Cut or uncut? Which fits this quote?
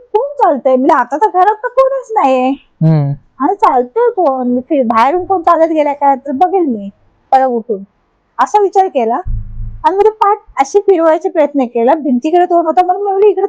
uncut